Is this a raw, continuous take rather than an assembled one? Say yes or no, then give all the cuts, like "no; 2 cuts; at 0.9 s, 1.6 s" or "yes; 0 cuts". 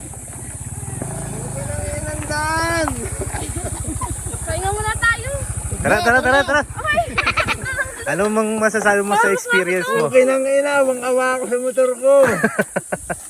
yes; 0 cuts